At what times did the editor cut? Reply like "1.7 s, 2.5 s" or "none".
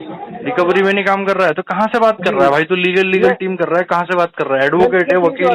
none